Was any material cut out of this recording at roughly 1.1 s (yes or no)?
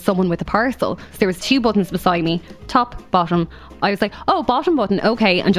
yes